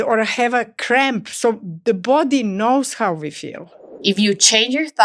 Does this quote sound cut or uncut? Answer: cut